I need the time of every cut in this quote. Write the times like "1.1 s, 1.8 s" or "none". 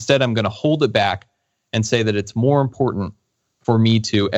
none